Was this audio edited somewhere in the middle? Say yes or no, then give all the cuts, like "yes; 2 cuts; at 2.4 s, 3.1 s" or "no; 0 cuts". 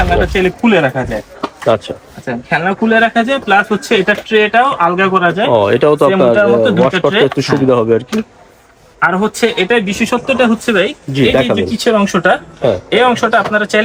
no; 0 cuts